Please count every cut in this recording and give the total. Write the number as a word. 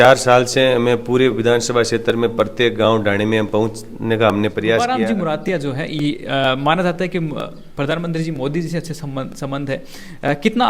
one